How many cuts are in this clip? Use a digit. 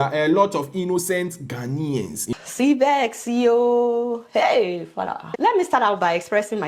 1